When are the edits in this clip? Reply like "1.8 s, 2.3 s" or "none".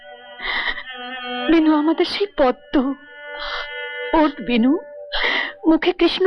none